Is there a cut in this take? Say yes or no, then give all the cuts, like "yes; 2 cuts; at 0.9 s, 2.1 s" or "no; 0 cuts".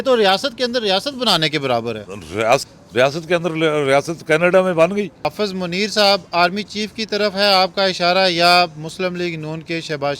yes; 2 cuts; at 2.7 s, 5.3 s